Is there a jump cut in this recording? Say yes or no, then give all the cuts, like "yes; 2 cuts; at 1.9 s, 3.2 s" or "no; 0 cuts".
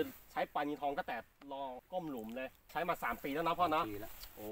yes; 2 cuts; at 1.8 s, 2.7 s